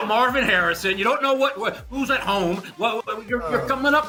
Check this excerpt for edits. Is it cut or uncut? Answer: uncut